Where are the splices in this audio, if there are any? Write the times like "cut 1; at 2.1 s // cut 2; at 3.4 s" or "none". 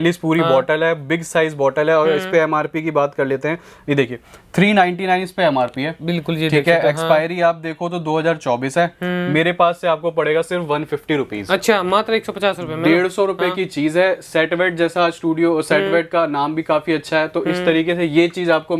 none

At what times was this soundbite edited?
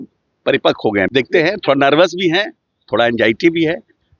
cut 1; at 1.1 s

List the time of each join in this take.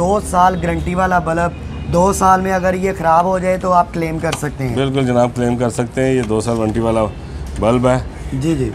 none

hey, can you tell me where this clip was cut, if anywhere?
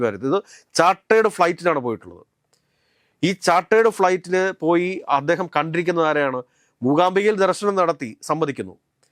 none

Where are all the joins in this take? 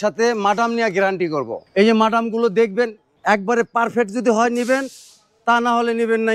cut 1; at 1.6 s // cut 2; at 3.1 s

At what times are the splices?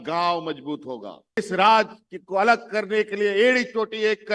cut 1; at 1.4 s

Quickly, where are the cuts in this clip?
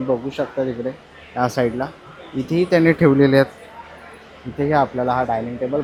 none

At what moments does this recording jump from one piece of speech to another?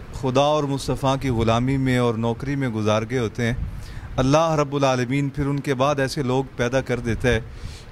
none

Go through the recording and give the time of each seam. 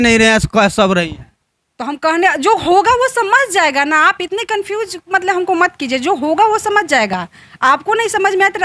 none

